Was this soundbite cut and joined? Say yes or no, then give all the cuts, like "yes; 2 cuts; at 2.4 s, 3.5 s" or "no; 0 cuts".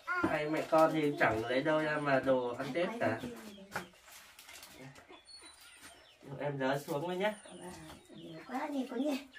no; 0 cuts